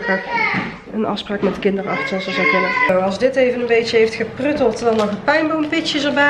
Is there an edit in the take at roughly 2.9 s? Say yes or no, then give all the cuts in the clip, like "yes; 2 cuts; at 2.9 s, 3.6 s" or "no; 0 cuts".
yes; 1 cut; at 2.9 s